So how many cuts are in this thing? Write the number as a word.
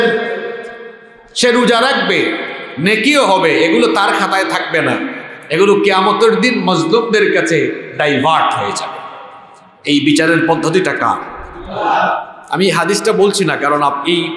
zero